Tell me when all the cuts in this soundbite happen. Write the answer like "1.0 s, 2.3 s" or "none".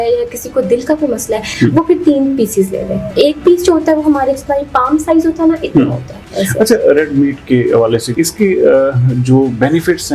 3.0 s, 6.3 s, 8.1 s